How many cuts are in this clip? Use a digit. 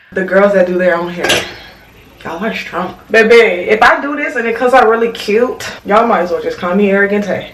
1